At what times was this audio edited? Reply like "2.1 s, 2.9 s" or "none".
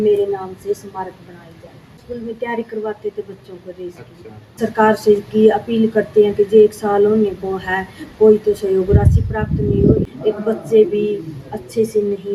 2.0 s, 4.6 s, 10.1 s